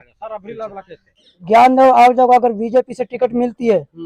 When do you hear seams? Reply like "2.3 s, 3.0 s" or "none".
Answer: 1.0 s